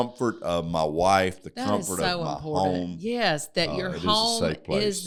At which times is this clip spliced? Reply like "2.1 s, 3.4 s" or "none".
none